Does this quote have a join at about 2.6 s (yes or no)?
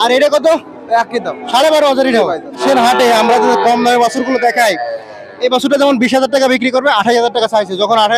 yes